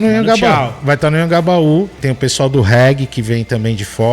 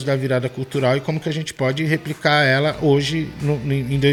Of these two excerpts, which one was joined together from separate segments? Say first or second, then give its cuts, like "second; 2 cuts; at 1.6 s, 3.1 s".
first; 1 cut; at 2.0 s